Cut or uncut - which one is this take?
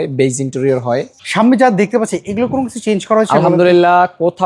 cut